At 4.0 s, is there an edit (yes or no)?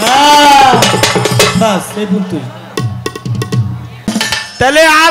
yes